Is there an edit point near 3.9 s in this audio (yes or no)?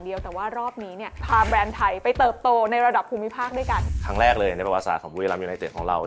yes